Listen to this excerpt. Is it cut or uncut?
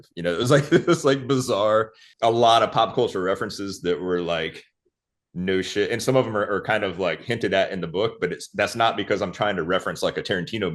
cut